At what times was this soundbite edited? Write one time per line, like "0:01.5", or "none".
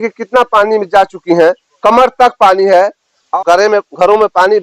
0:03.3